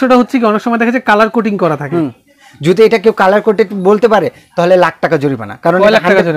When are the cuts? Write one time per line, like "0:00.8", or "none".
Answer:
none